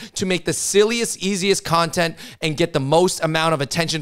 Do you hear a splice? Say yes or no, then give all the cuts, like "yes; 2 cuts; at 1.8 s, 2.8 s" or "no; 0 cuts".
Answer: no; 0 cuts